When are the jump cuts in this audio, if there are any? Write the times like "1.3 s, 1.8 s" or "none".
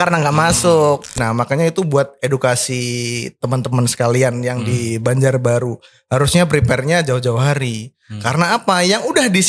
1.2 s